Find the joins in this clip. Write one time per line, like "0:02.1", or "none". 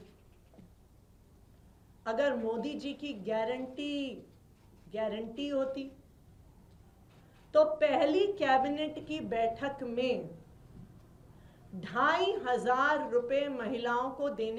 none